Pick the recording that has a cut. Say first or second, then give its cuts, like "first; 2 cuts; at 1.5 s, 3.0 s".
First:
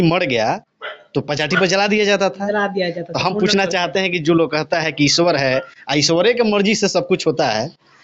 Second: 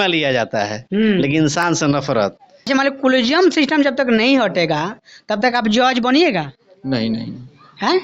second; 1 cut; at 2.5 s